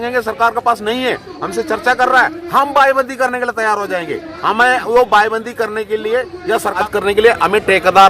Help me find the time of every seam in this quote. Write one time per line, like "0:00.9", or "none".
0:06.9